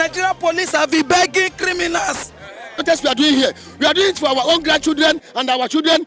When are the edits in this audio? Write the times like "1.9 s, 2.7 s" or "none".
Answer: 2.8 s